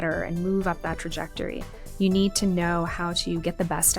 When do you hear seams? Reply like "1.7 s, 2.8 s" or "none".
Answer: none